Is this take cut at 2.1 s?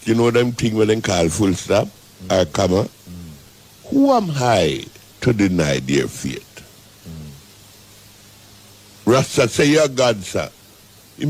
no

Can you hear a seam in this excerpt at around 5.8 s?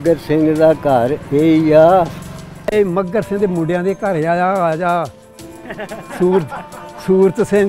no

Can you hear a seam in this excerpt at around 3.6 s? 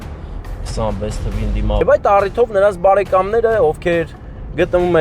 no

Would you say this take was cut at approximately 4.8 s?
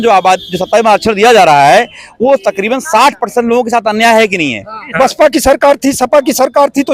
yes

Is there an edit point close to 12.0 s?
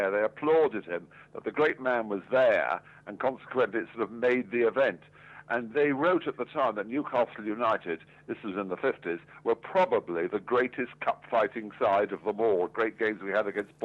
no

